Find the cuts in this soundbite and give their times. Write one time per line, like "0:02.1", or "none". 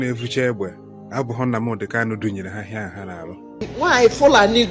0:03.6